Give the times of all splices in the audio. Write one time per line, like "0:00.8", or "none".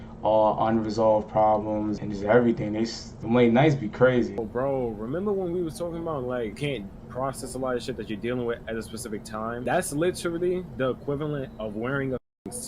0:02.0
0:03.1
0:04.4
0:06.6
0:09.6

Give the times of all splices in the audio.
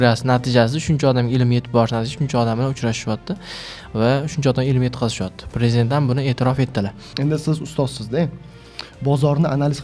0:07.0

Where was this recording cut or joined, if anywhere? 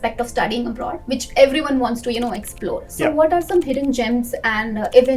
0:01.0

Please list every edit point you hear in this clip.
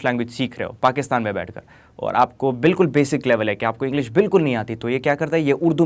none

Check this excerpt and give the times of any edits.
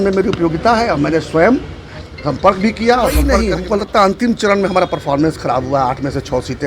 0:03.5

